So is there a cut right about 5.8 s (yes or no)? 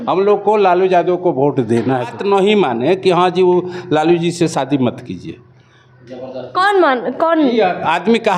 no